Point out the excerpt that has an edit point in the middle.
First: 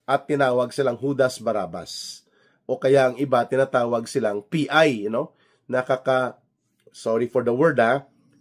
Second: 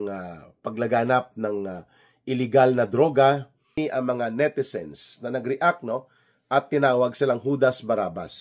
second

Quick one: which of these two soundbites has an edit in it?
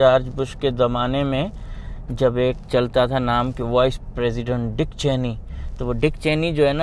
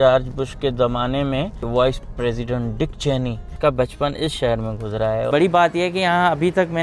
second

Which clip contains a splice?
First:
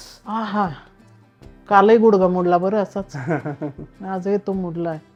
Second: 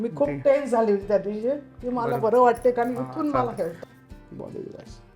second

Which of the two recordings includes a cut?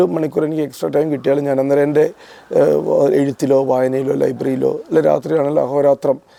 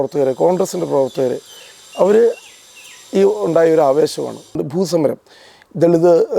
second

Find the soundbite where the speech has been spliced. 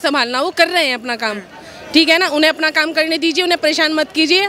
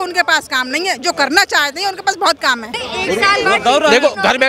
second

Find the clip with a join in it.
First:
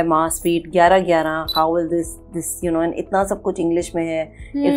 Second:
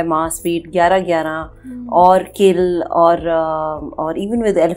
first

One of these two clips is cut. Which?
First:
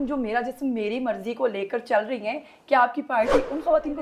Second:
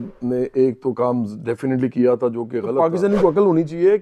second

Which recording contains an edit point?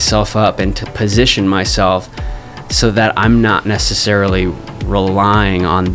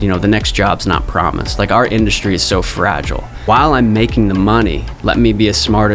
second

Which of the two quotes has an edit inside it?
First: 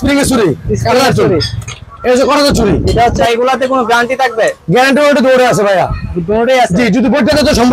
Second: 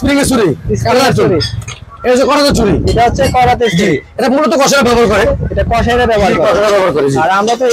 first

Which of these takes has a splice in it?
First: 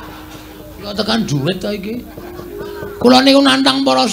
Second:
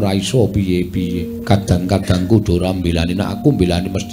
second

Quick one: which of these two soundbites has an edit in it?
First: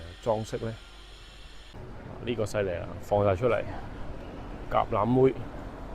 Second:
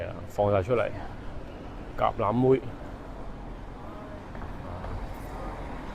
first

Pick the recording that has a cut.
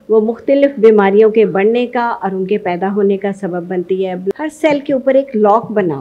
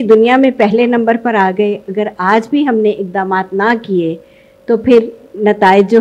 first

